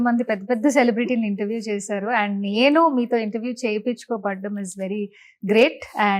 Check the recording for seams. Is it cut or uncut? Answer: uncut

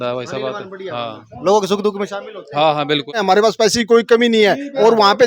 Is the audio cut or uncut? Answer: cut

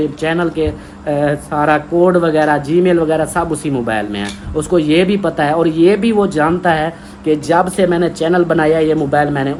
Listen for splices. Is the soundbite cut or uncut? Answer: uncut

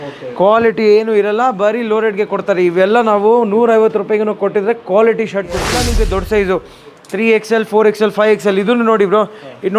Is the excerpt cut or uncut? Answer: cut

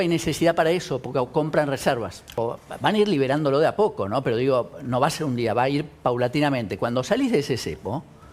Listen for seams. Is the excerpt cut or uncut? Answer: cut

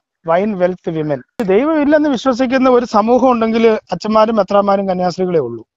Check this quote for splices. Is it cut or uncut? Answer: cut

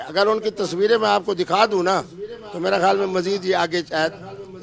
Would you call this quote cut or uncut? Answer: uncut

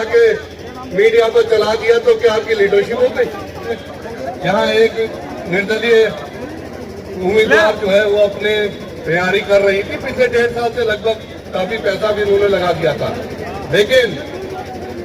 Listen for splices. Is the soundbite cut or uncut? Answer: cut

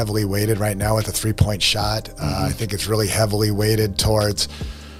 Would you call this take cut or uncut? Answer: uncut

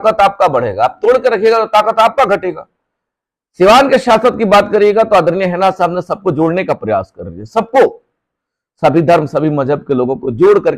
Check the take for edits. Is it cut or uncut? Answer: uncut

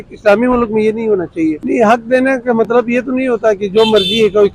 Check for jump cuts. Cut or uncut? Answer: cut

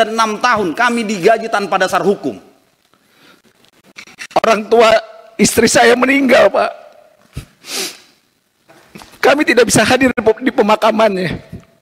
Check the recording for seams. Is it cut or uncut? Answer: cut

